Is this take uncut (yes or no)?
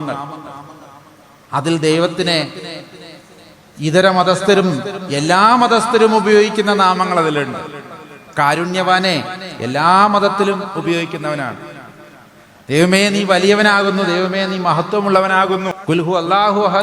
no